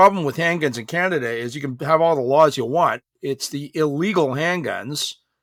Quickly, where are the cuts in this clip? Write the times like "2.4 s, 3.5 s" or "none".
none